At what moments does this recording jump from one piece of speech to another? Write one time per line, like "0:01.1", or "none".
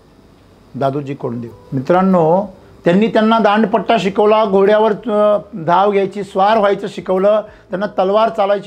0:01.6